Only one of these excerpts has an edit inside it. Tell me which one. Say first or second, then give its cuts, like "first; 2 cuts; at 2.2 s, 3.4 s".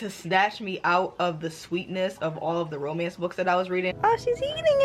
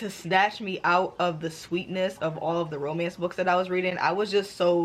first; 1 cut; at 3.9 s